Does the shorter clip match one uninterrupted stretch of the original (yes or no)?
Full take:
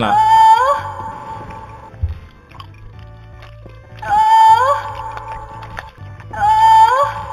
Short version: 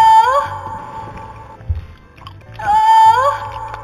no